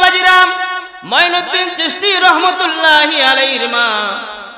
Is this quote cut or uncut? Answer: cut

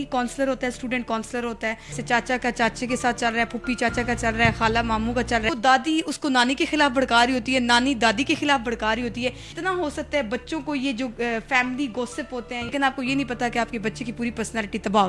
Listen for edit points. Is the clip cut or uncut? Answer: cut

